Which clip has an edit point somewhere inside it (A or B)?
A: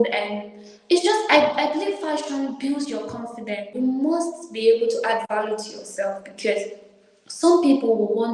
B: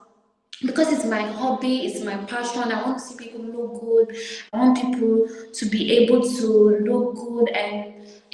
A